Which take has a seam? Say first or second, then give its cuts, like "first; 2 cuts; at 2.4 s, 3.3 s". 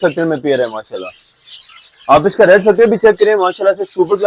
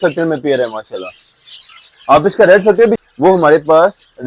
second; 1 cut; at 3.0 s